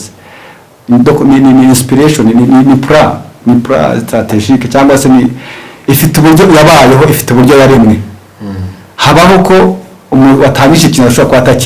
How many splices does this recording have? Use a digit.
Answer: 0